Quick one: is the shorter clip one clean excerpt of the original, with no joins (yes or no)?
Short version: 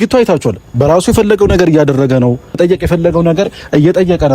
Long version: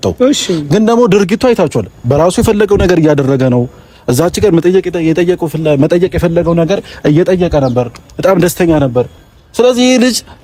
no